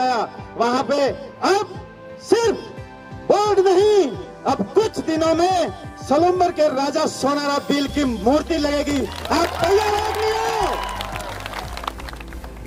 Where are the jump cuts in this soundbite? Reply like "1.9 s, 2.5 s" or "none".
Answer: none